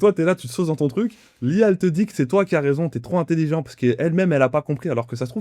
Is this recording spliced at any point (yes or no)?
no